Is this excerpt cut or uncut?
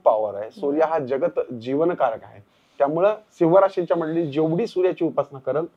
uncut